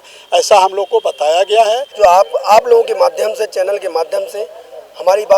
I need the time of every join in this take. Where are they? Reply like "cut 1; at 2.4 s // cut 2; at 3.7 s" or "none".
cut 1; at 1.9 s